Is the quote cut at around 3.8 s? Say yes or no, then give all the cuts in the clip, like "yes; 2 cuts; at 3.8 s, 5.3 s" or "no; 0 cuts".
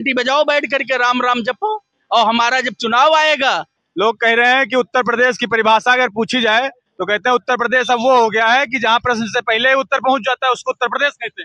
yes; 1 cut; at 3.8 s